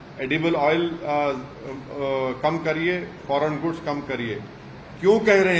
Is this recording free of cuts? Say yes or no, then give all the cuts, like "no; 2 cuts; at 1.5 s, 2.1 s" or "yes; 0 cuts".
yes; 0 cuts